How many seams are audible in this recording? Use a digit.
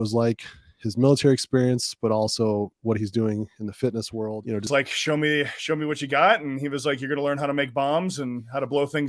1